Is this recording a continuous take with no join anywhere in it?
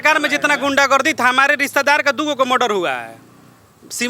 yes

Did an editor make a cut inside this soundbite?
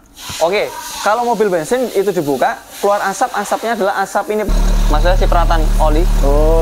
yes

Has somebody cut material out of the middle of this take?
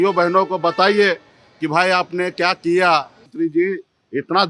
yes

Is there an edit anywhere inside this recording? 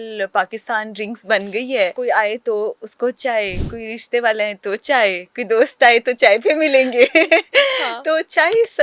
yes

